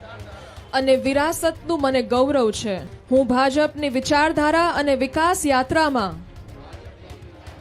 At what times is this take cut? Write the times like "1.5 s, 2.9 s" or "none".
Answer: 2.9 s